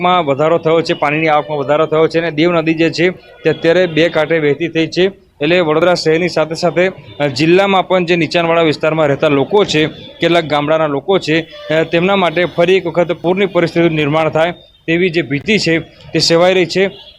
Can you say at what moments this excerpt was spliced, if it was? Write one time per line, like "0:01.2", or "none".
0:06.3